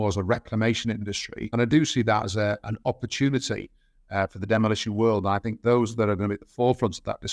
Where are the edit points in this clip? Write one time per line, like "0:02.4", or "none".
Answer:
0:01.3